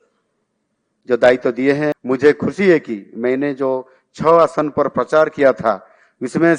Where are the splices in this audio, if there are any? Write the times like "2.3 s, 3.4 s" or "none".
2.0 s

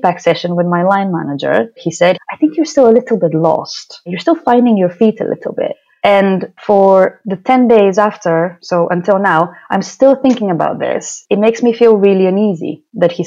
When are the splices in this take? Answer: 1.9 s, 6.5 s, 11.1 s

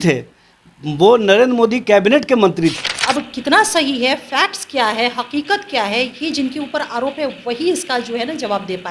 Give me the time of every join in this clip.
2.8 s

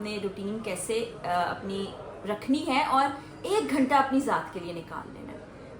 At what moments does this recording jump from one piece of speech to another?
none

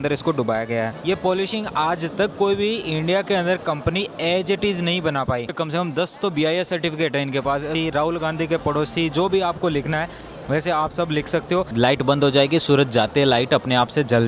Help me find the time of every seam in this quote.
0.9 s, 5.5 s, 7.7 s, 11.7 s

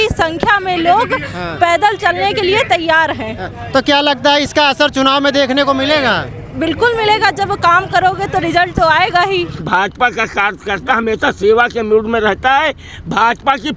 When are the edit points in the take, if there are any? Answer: 9.6 s

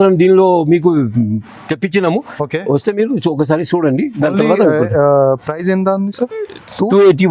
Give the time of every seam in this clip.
none

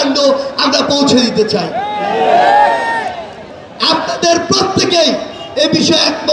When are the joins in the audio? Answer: none

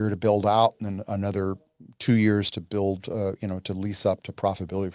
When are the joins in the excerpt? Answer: none

